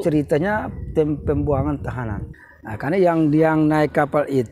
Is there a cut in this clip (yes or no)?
yes